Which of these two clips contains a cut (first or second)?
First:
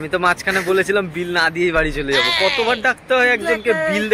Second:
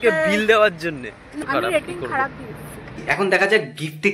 second